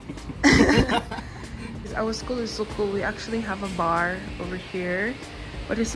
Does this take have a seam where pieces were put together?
yes; 1 cut; at 1.9 s

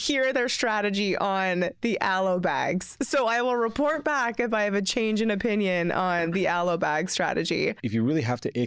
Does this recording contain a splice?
yes; 1 cut; at 7.8 s

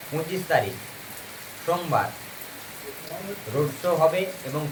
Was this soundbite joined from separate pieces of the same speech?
no; 0 cuts

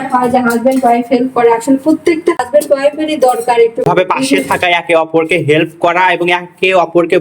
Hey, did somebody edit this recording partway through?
yes; 2 cuts; at 2.4 s, 3.8 s

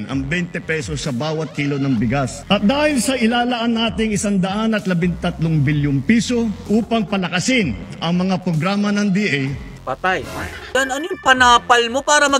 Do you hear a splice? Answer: yes; 2 cuts; at 2.4 s, 10.7 s

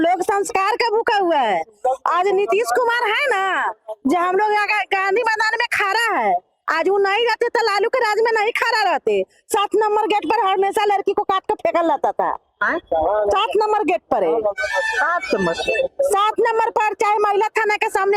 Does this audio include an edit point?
no; 0 cuts

